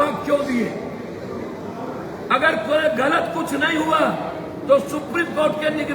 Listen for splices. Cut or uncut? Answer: uncut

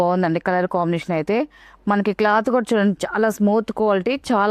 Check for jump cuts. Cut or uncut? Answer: uncut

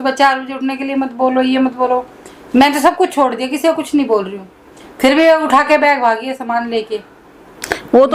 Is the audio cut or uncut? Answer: uncut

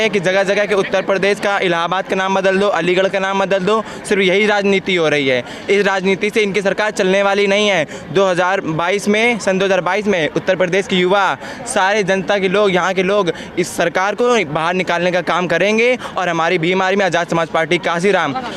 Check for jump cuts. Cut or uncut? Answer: uncut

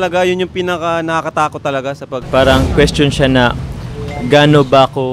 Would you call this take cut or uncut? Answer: cut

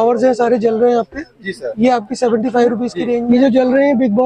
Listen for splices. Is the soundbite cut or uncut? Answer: cut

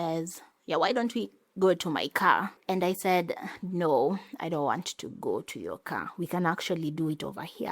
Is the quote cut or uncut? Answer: cut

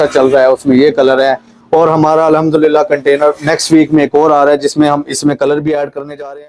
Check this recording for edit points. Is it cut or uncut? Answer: uncut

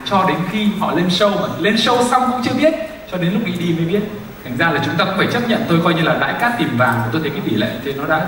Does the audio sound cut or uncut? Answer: uncut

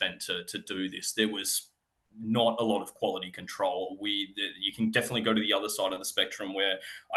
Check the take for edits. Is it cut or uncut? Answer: uncut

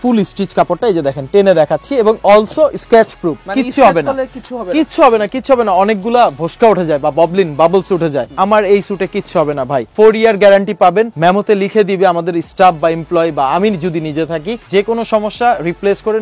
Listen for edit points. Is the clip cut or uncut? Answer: uncut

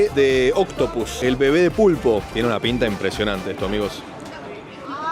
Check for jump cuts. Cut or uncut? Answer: uncut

